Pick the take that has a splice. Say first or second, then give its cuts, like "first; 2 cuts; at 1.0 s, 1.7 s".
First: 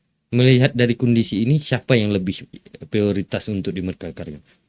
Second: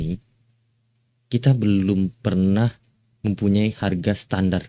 first; 1 cut; at 2.5 s